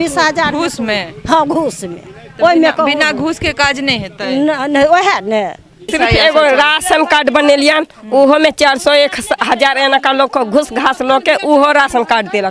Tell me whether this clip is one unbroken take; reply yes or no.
no